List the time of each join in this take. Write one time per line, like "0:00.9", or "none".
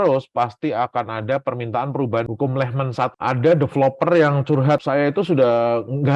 0:02.3
0:03.1
0:04.8